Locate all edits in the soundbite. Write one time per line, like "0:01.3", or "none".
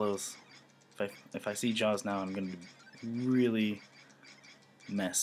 none